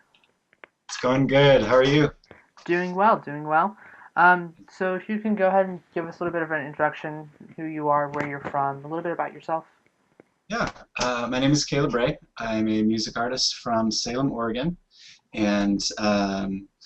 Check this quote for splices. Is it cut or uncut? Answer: cut